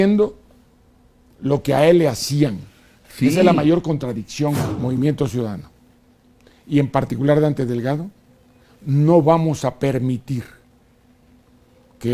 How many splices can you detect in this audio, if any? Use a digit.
1